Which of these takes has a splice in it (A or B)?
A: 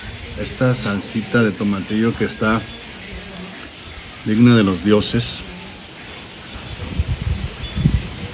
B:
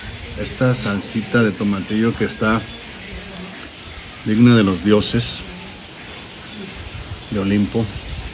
A